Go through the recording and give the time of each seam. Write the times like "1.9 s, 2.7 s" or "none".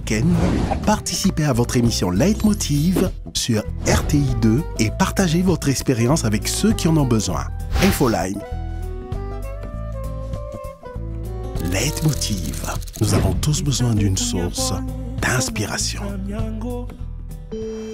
16.9 s